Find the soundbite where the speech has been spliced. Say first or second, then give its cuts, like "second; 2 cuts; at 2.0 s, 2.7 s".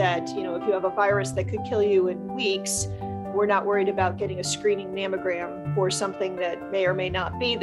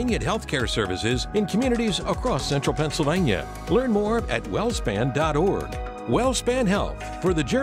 first; 2 cuts; at 5.6 s, 6.6 s